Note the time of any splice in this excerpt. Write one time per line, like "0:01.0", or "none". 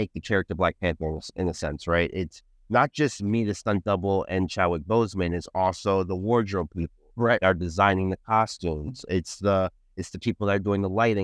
none